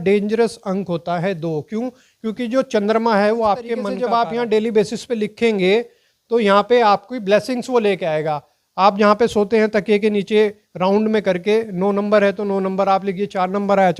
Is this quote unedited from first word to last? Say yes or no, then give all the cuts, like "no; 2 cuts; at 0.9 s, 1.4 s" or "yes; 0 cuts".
no; 1 cut; at 3.9 s